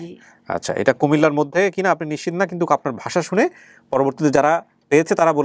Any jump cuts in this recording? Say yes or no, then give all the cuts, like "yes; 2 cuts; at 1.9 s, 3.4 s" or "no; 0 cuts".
no; 0 cuts